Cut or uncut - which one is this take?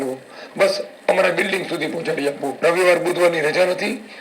cut